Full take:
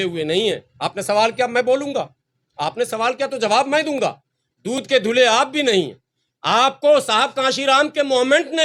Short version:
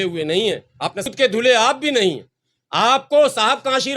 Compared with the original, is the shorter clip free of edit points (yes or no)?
no